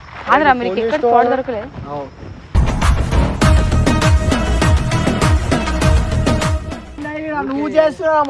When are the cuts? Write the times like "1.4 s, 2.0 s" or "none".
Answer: 7.0 s